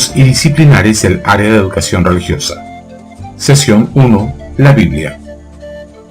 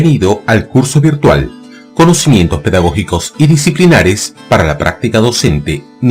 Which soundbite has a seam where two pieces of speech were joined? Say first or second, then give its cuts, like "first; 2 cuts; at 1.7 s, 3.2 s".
first; 1 cut; at 5.1 s